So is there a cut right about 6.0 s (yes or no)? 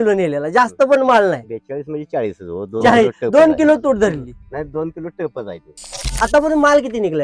yes